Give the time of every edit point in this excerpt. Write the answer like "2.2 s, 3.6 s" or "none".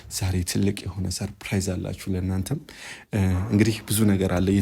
none